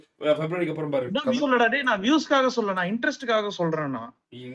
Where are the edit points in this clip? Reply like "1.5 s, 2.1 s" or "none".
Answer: 1.4 s